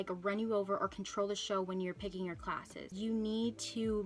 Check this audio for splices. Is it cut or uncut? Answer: cut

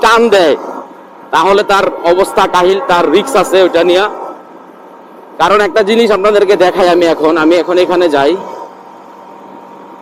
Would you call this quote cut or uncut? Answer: uncut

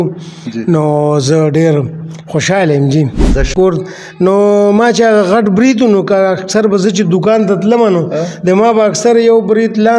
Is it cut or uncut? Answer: cut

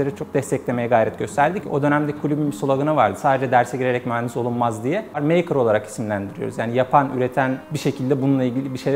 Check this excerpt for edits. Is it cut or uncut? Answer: cut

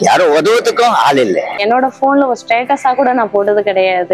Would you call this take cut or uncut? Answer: cut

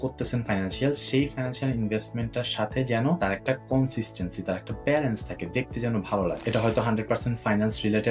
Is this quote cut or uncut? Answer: uncut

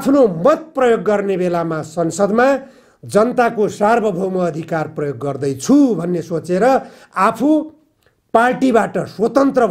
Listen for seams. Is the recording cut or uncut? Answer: uncut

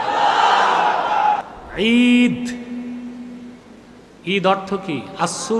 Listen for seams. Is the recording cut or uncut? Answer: cut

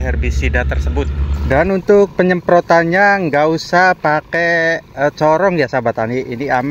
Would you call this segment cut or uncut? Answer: cut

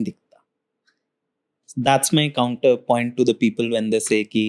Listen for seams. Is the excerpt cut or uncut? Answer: uncut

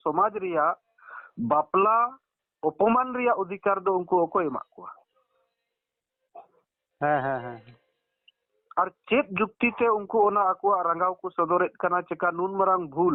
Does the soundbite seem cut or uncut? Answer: uncut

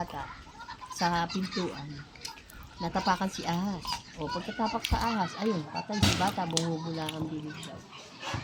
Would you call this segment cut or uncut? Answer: uncut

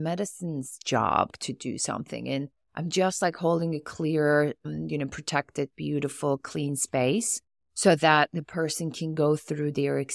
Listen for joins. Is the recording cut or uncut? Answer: cut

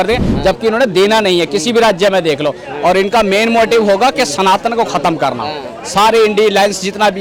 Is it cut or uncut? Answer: uncut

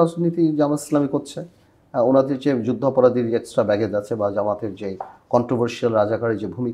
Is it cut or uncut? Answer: uncut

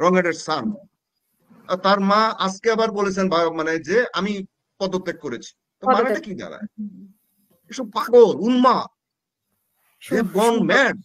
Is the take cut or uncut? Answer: uncut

